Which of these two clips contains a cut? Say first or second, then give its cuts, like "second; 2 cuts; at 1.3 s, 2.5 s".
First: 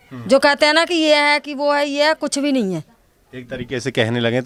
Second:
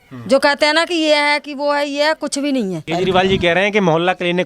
second; 1 cut; at 2.8 s